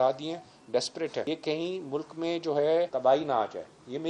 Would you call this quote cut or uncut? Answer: cut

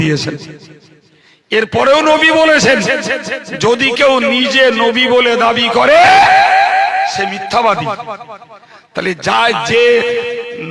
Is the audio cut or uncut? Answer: uncut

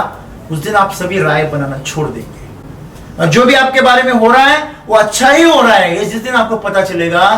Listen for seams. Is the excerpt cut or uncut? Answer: uncut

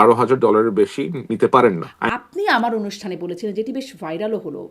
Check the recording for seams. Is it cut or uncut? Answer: cut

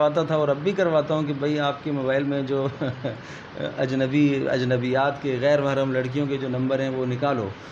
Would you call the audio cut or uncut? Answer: uncut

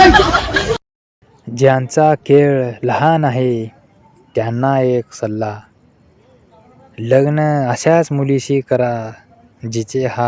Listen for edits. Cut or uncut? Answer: cut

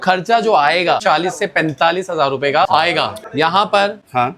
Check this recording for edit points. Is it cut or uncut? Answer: cut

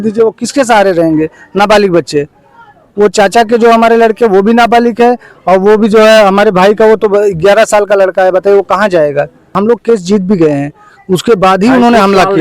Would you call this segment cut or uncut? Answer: cut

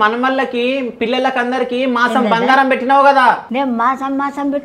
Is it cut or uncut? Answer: uncut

